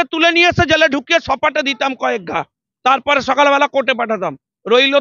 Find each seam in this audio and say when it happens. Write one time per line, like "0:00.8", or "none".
none

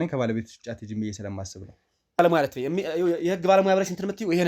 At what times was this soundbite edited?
0:02.2

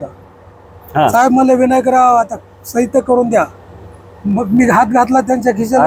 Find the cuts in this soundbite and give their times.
none

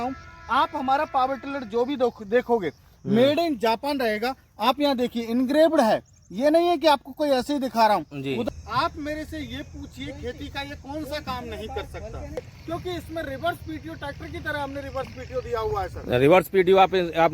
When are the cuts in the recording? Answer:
0:08.5
0:12.4

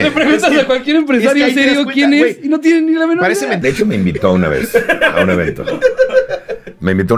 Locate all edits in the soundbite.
0:03.6

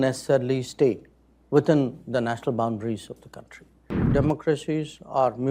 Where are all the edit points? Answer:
0:04.0

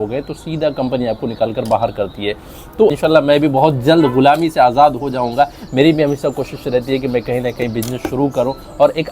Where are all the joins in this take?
0:03.0

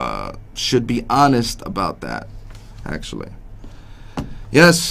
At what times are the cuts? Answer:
0:03.6

